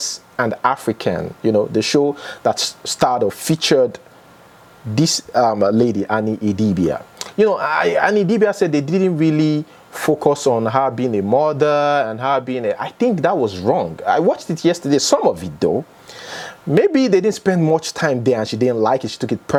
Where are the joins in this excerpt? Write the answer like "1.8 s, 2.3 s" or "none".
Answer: none